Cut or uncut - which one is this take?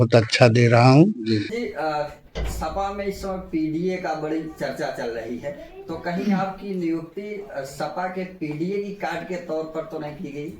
cut